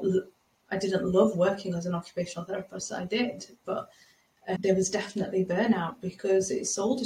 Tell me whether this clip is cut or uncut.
cut